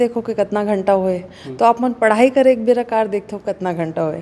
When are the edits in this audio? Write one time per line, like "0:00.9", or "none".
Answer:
none